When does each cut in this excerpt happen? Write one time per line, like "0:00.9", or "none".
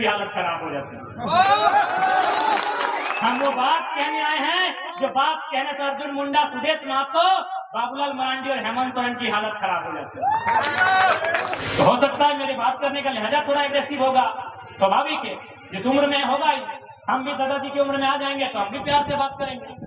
0:11.6